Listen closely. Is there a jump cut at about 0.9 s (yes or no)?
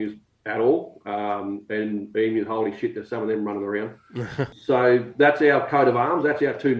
no